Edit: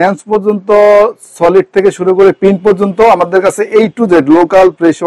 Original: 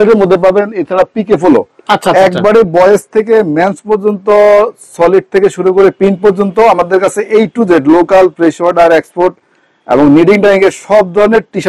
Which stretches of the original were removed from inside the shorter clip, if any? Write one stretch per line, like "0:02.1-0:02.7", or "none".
none